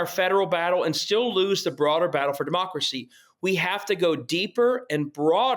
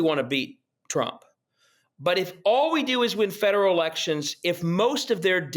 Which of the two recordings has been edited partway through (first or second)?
second